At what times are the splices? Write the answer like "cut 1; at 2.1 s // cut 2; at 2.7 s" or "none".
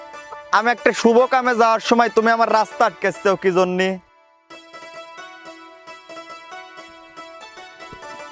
cut 1; at 4.1 s